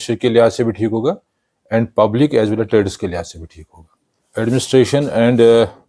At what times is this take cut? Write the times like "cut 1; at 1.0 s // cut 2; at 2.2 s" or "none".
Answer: cut 1; at 4.3 s